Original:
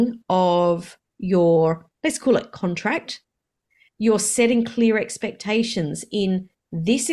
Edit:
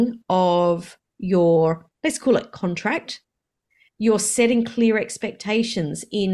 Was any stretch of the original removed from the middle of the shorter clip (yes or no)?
no